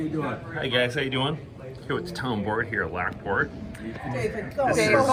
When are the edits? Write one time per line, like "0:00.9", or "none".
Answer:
none